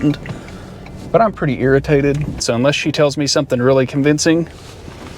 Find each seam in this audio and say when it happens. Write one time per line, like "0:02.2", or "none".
0:02.4

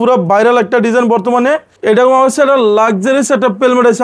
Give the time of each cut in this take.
0:01.7

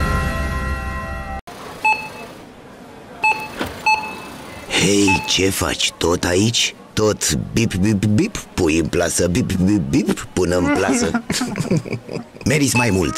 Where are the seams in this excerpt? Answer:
0:01.5

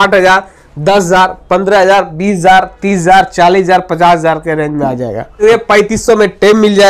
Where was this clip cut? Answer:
0:05.4

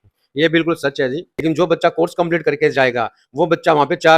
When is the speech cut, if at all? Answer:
0:01.3

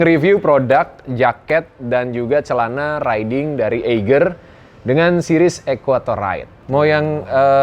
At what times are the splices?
0:06.5

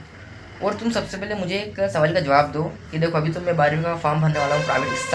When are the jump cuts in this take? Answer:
none

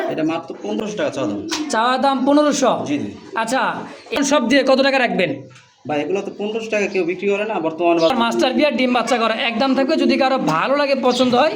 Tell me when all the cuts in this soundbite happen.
0:00.8
0:04.2
0:08.1

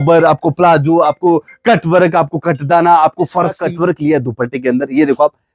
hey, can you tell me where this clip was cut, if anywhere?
0:03.6

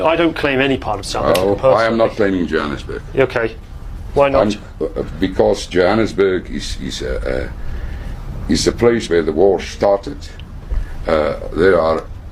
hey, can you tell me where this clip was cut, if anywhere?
none

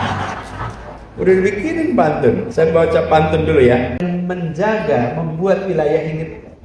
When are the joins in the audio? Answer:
0:04.0

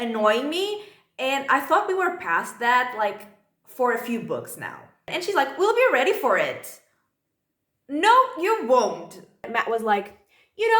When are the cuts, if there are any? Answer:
0:05.1
0:09.5

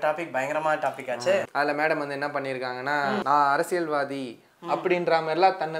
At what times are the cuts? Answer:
0:01.5
0:03.2

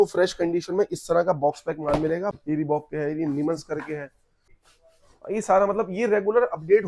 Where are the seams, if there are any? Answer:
0:02.4
0:04.5

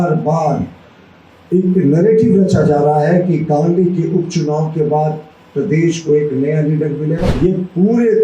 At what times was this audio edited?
0:07.3

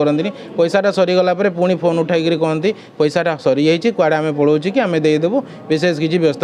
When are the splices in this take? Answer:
none

